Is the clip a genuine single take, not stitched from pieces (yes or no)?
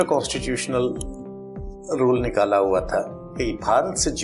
yes